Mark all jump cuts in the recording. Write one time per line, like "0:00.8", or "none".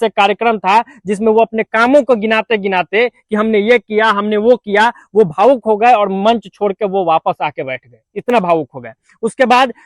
none